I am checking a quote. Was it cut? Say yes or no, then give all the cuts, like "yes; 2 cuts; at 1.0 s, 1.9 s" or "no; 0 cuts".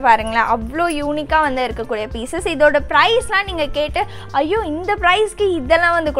no; 0 cuts